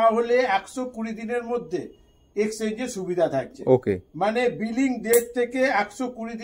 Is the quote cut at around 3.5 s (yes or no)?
no